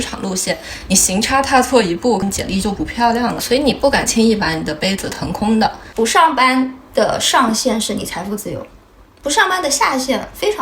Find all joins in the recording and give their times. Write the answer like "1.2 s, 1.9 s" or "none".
3.4 s, 5.8 s